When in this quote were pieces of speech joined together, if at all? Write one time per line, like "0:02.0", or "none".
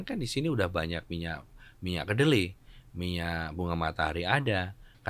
none